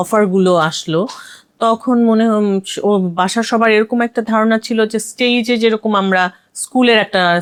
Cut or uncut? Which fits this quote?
uncut